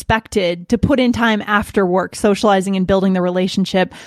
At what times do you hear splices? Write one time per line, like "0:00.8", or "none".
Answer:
none